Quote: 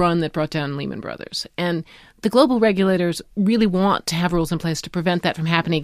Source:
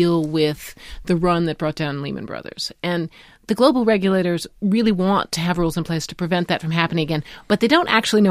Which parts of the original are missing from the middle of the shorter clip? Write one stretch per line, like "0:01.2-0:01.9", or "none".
none